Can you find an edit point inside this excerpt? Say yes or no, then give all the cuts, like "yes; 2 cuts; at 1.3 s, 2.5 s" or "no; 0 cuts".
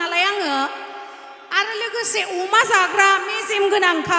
no; 0 cuts